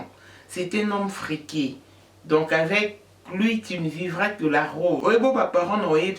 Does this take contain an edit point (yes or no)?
yes